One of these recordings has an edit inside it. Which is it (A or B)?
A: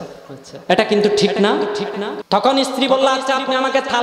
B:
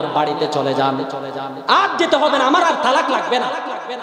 A